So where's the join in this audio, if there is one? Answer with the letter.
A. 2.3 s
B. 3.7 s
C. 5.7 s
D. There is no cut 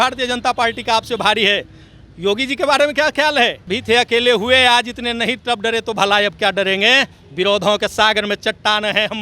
B